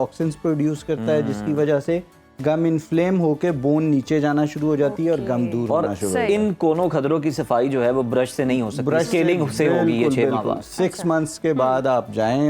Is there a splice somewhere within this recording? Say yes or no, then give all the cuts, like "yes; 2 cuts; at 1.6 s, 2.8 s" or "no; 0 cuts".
no; 0 cuts